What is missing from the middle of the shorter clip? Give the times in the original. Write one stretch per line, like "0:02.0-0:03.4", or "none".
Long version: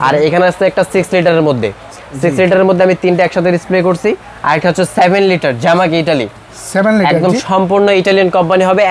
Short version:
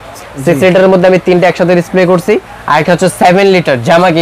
none